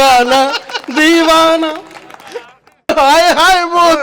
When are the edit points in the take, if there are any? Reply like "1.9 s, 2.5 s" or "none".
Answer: 2.9 s